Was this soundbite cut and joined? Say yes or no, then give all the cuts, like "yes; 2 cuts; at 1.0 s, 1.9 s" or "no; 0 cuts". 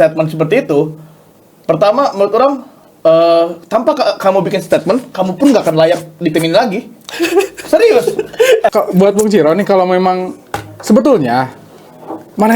yes; 1 cut; at 8.7 s